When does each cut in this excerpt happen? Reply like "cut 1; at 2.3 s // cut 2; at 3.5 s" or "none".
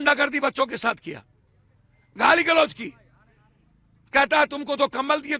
none